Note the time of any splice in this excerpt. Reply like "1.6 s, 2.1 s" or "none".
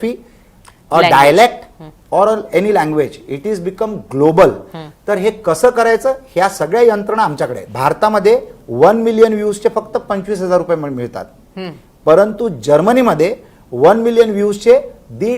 7.6 s